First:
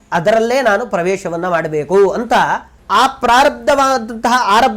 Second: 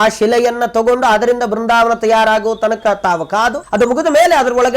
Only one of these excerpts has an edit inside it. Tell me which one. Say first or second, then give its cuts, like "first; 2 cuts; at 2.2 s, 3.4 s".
second; 1 cut; at 3.6 s